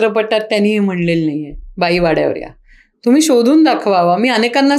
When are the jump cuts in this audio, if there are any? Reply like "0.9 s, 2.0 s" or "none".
none

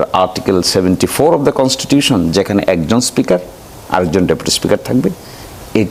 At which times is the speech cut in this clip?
none

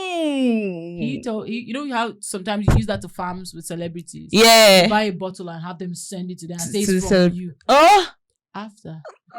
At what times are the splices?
none

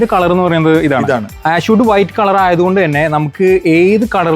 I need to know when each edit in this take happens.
1.3 s

